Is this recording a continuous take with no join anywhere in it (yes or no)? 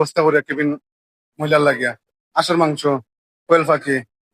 no